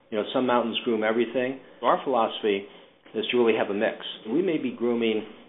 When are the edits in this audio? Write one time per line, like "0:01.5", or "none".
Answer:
0:01.7
0:04.3